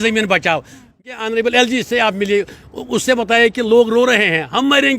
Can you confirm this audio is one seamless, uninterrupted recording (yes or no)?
no